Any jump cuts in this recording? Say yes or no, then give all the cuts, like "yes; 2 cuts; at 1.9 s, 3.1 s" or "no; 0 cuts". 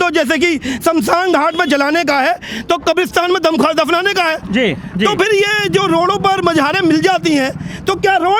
no; 0 cuts